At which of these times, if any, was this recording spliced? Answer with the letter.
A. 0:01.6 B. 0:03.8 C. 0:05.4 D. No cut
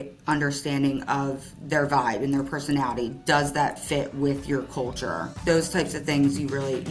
C